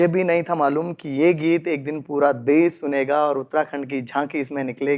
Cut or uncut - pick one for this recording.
uncut